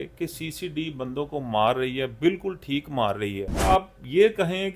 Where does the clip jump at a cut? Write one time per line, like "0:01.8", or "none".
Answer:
0:03.7